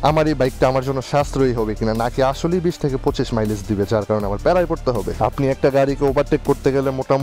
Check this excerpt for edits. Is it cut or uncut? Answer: cut